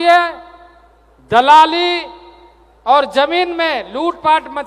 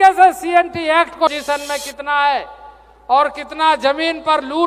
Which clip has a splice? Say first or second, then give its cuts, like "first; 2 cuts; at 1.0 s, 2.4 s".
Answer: second; 1 cut; at 1.3 s